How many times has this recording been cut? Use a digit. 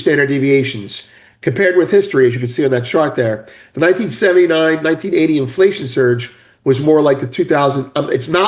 0